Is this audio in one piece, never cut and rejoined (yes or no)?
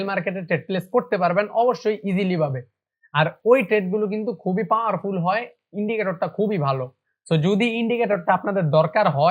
yes